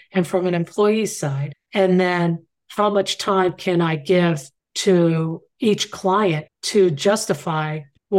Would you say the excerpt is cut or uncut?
uncut